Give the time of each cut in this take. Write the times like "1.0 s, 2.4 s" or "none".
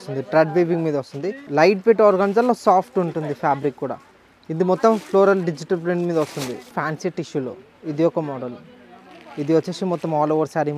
1.4 s, 6.8 s